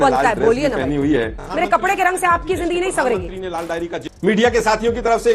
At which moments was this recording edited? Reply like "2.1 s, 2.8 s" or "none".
1.4 s, 4.0 s